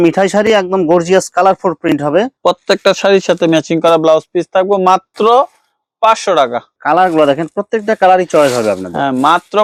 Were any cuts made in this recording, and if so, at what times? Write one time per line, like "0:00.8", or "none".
none

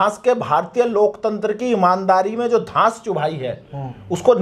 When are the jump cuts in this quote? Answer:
none

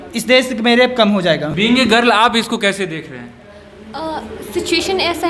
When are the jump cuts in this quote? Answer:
0:01.5

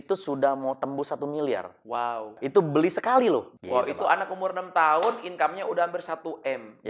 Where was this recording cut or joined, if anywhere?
0:02.4
0:03.6

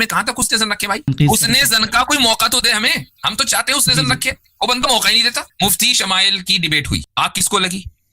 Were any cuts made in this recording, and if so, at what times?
0:01.1
0:05.4
0:07.1

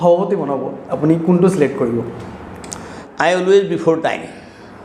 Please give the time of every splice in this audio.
0:03.0

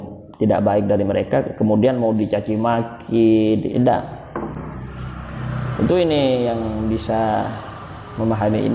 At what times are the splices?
0:03.7

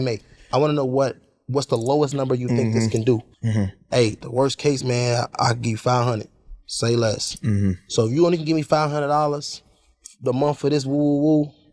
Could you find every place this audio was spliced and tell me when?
0:03.4
0:04.2

